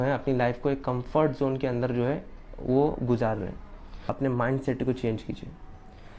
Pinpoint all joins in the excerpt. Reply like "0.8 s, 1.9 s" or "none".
4.2 s